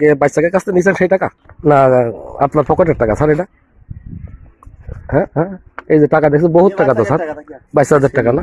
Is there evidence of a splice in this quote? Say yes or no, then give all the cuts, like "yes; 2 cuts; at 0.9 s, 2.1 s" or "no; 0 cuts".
yes; 1 cut; at 1.4 s